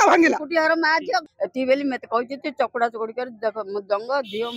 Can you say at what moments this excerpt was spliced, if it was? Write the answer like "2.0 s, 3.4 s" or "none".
1.2 s

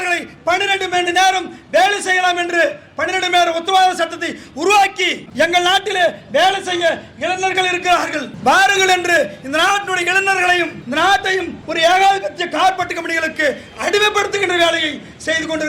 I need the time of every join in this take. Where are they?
5.2 s

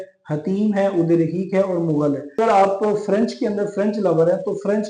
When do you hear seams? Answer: 2.4 s

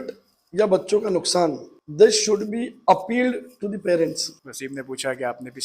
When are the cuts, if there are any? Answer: 4.3 s

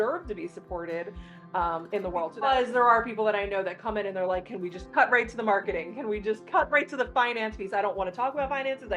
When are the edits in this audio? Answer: 2.3 s

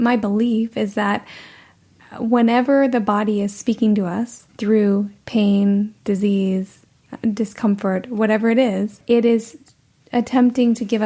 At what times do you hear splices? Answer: 4.4 s, 9.0 s

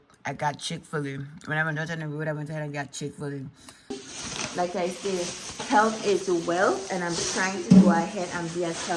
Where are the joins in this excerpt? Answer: 3.9 s

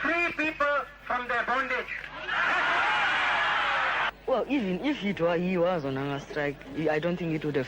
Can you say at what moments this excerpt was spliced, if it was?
4.1 s

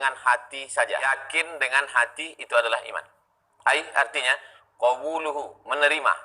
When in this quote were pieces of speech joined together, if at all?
1.0 s

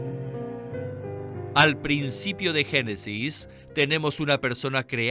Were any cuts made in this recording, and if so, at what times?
1.4 s

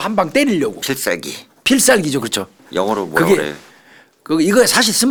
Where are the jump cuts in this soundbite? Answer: none

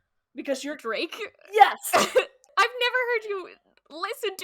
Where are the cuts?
2.5 s

